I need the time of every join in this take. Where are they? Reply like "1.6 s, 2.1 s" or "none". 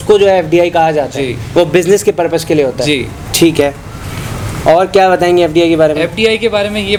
none